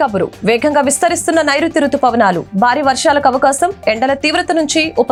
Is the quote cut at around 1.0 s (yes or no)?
no